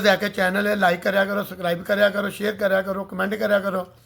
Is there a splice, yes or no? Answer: no